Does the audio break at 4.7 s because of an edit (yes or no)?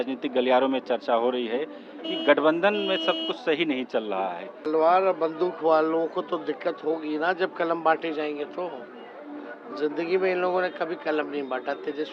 yes